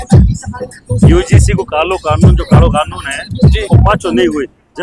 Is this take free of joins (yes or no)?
yes